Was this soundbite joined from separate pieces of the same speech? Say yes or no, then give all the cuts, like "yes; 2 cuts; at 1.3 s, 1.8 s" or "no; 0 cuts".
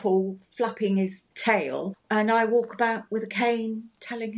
yes; 1 cut; at 1.7 s